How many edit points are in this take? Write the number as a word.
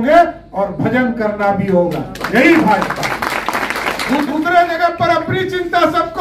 one